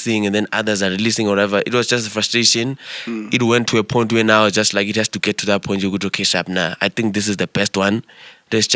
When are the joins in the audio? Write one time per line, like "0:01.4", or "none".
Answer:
none